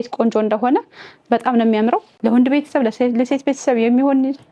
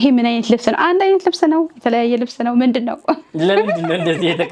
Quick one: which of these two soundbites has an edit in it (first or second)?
first